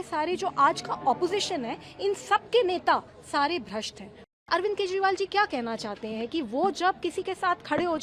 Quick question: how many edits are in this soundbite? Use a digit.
1